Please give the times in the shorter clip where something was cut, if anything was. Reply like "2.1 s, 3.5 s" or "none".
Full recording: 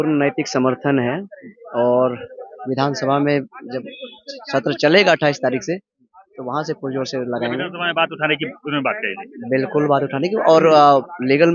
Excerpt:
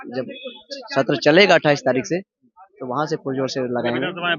none